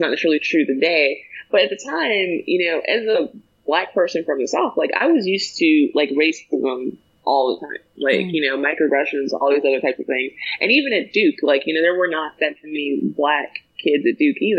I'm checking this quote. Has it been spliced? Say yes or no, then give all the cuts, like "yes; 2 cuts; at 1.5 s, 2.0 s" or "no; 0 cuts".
no; 0 cuts